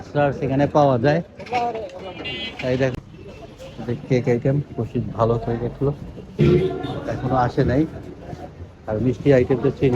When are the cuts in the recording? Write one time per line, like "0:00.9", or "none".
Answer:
0:02.9